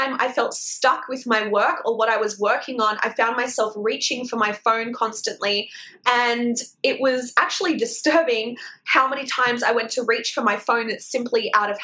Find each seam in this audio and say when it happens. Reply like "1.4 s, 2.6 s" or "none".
none